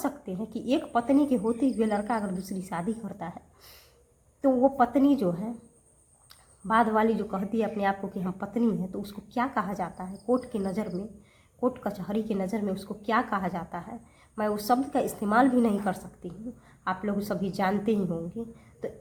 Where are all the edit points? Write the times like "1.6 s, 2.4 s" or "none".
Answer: none